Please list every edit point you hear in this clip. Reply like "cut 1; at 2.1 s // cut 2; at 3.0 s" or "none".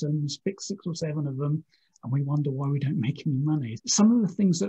cut 1; at 3.7 s